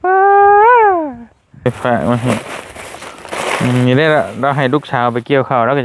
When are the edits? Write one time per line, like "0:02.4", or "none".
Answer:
0:01.6